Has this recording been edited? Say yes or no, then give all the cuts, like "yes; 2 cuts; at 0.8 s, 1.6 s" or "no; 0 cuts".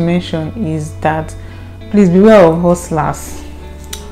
no; 0 cuts